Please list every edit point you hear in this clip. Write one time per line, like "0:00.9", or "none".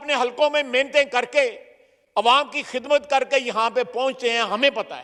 none